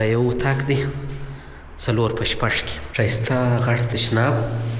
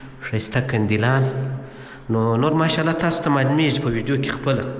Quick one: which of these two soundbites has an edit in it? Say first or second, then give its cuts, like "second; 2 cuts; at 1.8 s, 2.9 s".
first; 1 cut; at 2.8 s